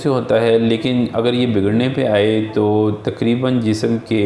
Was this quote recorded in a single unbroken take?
yes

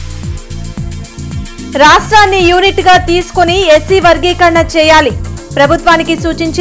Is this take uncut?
no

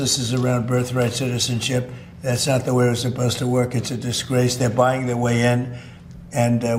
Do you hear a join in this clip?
no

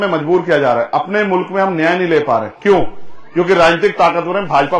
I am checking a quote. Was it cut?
no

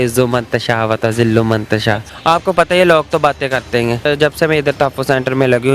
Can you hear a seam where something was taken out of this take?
yes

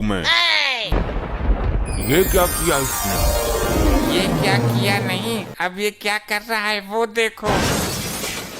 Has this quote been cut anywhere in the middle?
yes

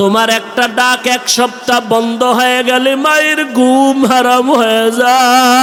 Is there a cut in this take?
no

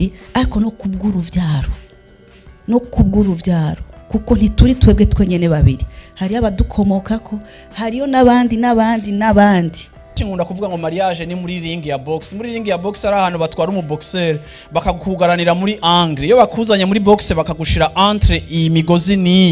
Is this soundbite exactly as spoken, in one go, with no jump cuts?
no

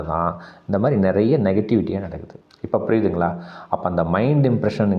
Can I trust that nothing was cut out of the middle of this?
yes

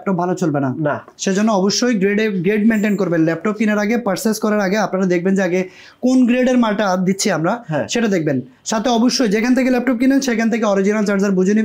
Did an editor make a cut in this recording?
no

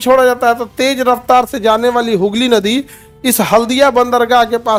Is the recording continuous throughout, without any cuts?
yes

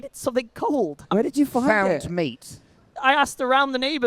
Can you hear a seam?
yes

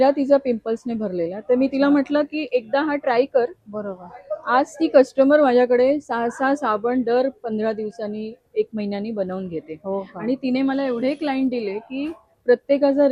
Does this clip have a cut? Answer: no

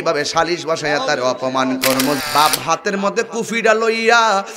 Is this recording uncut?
no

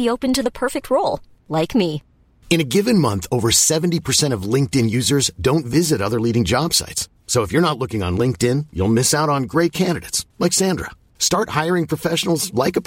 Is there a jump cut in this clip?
no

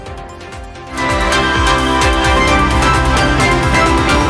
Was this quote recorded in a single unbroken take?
no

